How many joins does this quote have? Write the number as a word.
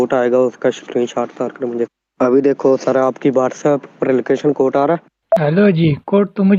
one